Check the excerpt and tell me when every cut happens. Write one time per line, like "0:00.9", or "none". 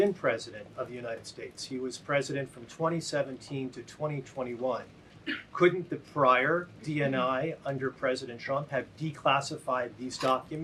none